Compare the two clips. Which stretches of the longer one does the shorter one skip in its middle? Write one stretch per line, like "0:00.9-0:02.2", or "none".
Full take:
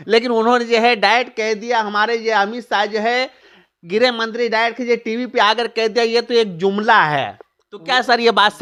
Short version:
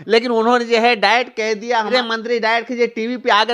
0:01.9-0:04.0